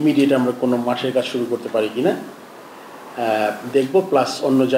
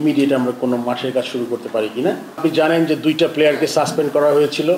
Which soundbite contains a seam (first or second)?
second